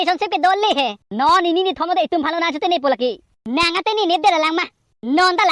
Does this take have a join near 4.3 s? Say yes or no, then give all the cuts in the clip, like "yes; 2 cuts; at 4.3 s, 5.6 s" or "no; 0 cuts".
no; 1 cut; at 1.0 s